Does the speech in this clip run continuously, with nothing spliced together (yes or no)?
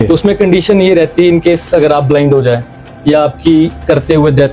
yes